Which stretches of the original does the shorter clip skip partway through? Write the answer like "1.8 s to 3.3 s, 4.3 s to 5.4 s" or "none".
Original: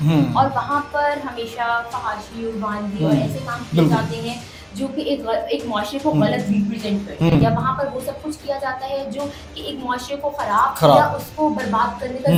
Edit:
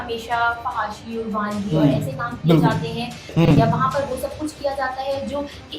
4.5 s to 7.1 s